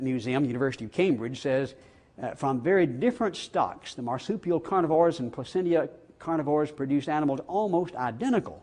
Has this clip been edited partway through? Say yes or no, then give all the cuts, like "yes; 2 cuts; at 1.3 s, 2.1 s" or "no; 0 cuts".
yes; 1 cut; at 3.4 s